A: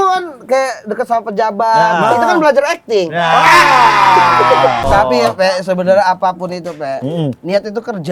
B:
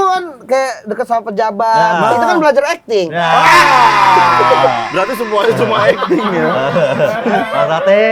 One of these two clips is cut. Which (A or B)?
A